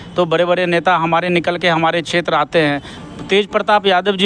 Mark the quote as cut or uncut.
cut